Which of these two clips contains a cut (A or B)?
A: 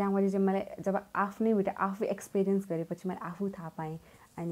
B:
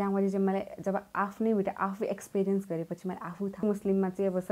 B